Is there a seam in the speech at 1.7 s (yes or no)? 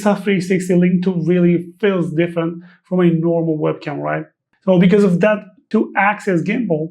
no